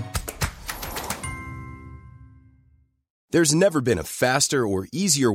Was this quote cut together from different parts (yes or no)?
yes